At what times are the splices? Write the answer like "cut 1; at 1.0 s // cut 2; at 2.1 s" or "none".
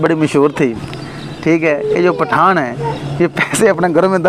none